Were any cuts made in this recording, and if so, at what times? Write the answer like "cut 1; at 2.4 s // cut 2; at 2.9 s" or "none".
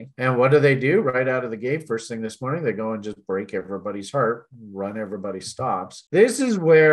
cut 1; at 6.0 s